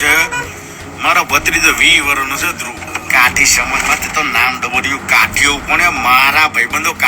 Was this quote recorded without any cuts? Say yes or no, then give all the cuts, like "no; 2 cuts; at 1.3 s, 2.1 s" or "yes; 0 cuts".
no; 1 cut; at 3.0 s